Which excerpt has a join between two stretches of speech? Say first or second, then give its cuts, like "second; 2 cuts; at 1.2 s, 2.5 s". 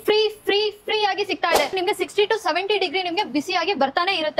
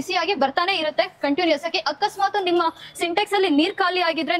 first; 1 cut; at 1.8 s